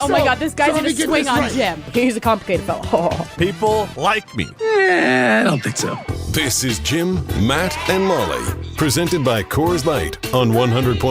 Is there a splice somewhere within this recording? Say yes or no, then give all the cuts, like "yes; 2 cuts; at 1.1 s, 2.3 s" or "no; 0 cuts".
no; 0 cuts